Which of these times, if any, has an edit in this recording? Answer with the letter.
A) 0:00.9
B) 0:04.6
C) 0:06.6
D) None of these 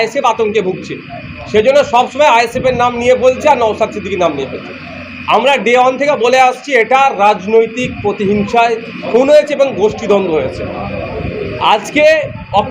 D